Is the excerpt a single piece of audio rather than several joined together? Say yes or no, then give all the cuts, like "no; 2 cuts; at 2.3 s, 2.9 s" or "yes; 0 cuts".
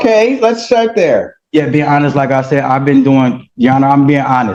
yes; 0 cuts